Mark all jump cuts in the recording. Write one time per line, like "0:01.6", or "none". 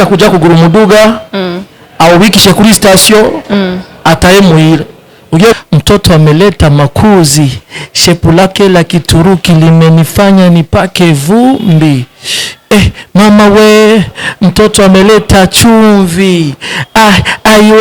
0:05.5